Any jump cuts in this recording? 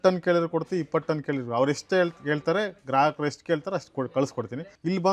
no; 0 cuts

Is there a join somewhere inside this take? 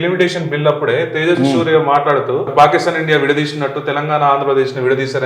yes; 1 cut; at 2.5 s

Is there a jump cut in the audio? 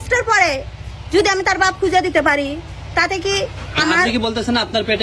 no; 0 cuts

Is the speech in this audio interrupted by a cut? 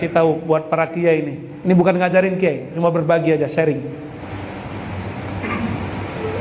no; 0 cuts

